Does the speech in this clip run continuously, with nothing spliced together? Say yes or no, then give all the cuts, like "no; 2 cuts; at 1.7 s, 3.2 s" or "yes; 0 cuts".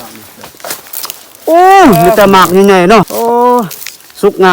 no; 1 cut; at 3.1 s